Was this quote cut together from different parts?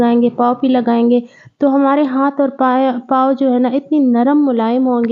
no; 0 cuts

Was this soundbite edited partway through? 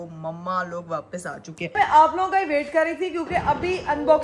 yes; 1 cut; at 1.8 s

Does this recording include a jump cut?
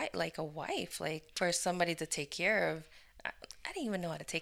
yes; 1 cut; at 1.3 s

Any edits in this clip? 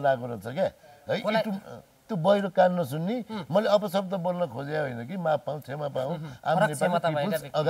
no; 0 cuts

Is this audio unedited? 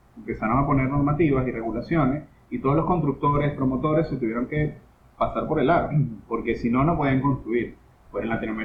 yes; 0 cuts

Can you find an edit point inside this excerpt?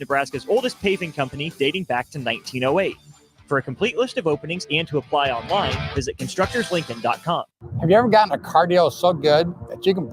yes; 1 cut; at 7.6 s

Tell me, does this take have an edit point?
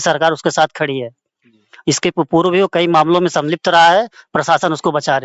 no; 0 cuts

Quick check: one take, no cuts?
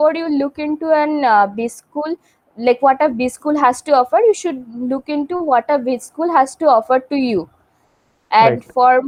yes; 0 cuts

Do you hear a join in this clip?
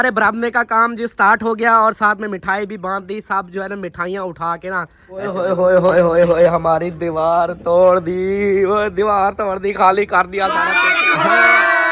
yes; 2 cuts; at 5.3 s, 10.8 s

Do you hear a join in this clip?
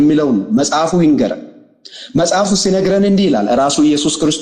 no; 0 cuts

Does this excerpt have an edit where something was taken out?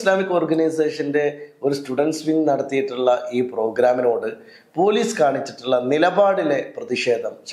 no; 0 cuts

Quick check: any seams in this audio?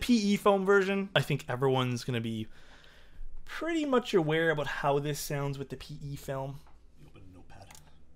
yes; 1 cut; at 1.2 s

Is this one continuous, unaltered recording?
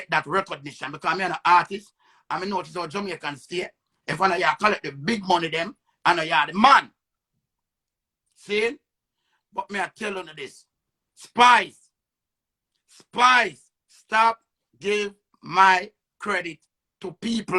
yes; 0 cuts

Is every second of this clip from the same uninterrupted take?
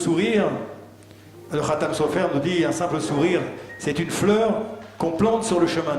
yes; 0 cuts

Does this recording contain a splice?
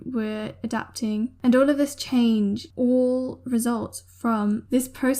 yes; 2 cuts; at 1.3 s, 2.7 s

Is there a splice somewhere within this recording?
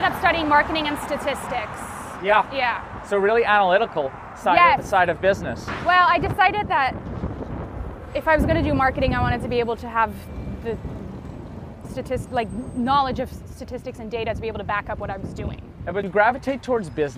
no; 0 cuts

